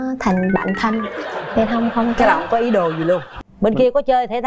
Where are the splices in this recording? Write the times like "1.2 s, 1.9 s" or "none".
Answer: 3.3 s